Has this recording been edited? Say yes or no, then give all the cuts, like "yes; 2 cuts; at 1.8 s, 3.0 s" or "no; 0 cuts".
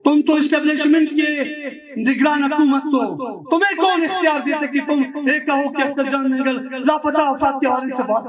no; 0 cuts